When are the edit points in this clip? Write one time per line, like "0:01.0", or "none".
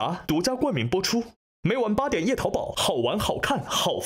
0:01.4